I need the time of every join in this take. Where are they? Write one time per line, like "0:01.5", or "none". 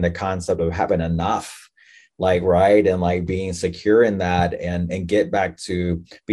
none